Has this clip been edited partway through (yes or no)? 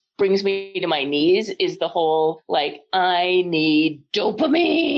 yes